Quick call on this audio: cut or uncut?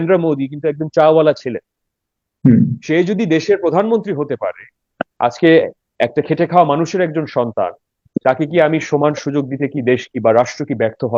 uncut